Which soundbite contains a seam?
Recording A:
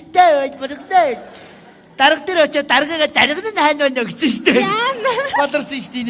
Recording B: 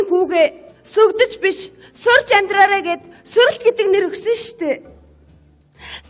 A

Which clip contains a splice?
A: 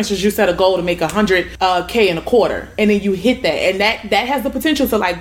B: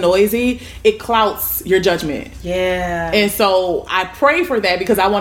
A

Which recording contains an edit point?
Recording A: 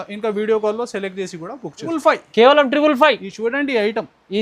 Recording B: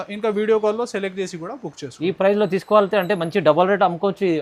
A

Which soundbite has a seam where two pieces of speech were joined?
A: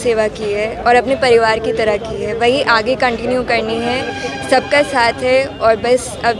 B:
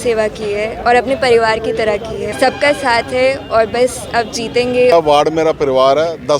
B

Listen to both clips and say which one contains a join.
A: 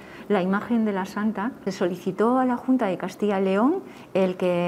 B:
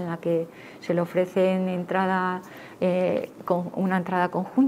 A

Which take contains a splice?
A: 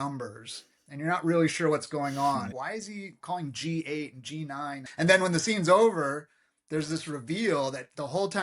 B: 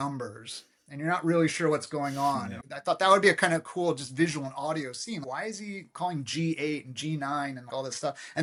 A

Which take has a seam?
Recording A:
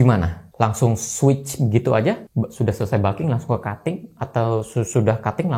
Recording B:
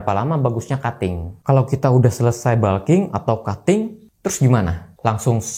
B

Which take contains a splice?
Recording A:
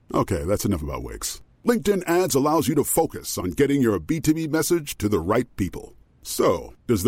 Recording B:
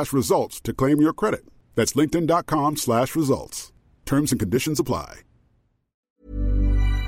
B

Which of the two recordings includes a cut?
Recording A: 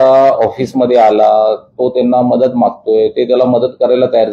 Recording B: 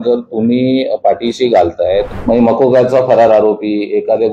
B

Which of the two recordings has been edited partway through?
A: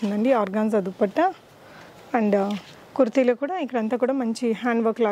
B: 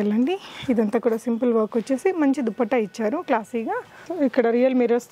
B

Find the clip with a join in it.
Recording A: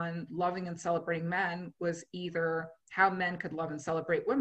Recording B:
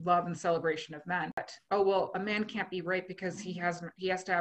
B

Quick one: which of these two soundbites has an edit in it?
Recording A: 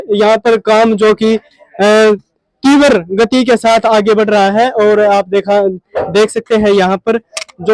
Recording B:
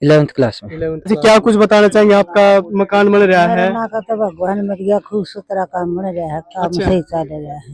B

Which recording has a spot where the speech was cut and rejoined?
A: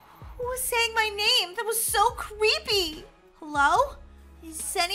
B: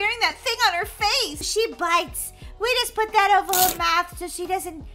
B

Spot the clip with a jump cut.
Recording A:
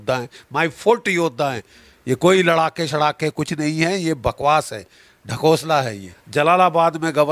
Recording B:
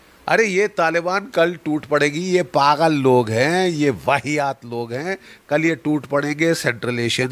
A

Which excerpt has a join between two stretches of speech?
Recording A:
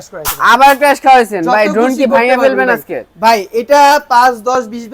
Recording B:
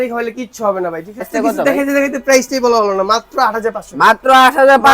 B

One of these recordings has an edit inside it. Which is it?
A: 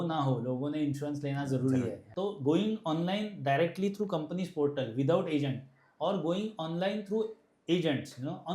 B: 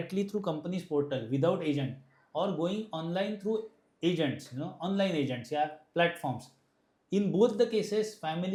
A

